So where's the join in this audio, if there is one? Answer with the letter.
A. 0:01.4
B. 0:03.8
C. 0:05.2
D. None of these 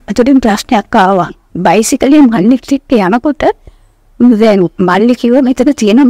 A